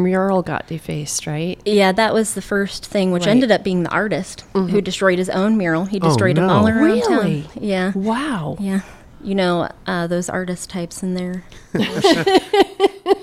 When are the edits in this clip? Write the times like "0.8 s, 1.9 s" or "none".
none